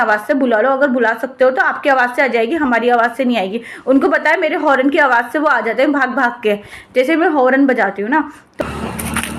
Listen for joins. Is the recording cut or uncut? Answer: uncut